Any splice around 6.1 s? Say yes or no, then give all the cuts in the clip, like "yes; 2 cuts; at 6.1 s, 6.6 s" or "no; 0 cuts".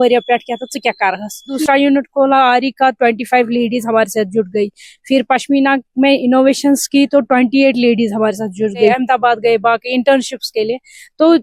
no; 2 cuts; at 1.6 s, 8.9 s